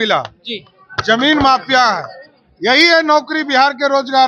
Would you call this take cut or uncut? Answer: uncut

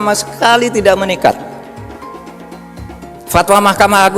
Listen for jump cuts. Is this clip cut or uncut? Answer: cut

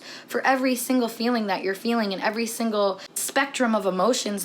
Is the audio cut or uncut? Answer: cut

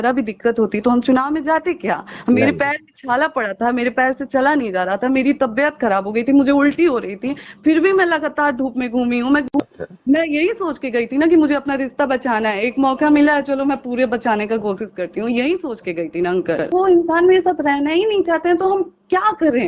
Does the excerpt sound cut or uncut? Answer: cut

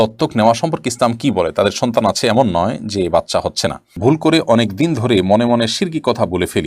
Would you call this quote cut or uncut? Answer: cut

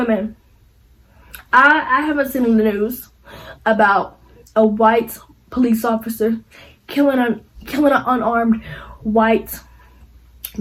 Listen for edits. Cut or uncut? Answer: uncut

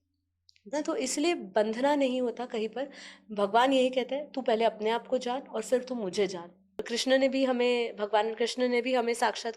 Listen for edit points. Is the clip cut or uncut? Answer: cut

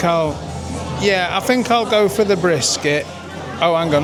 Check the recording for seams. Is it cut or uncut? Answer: uncut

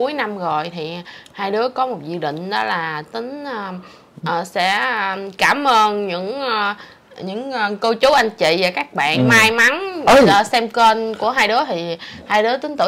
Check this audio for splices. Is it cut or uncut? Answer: uncut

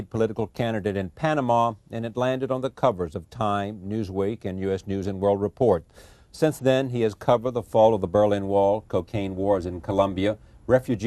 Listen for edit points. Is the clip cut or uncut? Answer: uncut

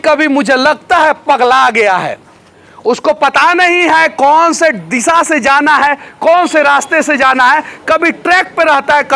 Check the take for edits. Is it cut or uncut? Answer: uncut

